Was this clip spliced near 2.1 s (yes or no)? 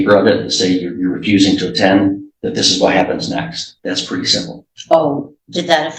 no